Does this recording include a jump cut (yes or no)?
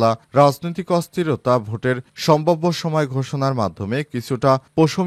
no